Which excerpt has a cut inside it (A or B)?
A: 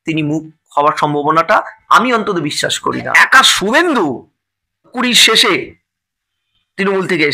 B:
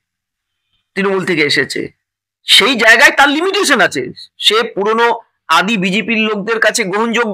A